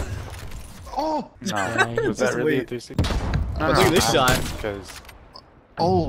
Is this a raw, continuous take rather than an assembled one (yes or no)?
no